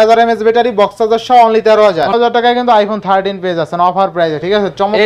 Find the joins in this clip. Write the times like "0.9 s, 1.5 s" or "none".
2.1 s